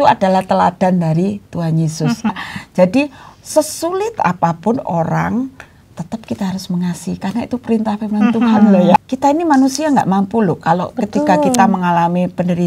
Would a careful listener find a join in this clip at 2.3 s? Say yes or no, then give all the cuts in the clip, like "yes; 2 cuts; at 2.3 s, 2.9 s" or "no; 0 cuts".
yes; 2 cuts; at 2.3 s, 9.0 s